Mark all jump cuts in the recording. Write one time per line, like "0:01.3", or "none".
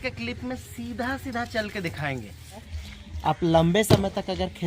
0:02.7